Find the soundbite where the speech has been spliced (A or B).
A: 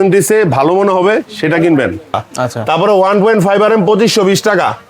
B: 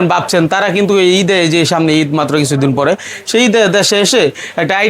A